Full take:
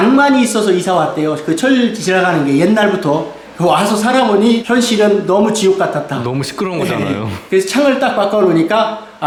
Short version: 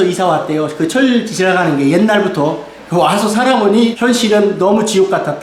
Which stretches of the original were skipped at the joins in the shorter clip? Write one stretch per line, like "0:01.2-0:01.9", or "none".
none